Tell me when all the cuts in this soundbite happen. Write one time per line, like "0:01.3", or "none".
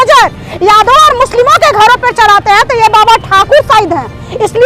none